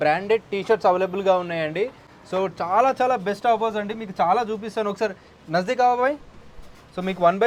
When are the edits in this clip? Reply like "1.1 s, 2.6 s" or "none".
none